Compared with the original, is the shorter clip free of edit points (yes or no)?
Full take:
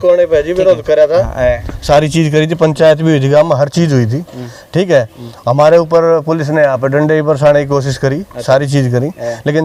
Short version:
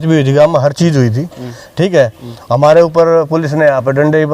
yes